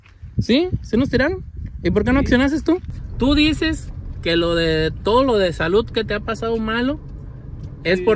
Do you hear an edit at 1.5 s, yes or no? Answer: no